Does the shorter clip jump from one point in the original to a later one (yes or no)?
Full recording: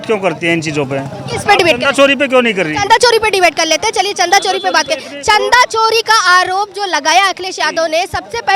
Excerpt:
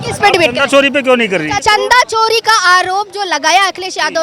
yes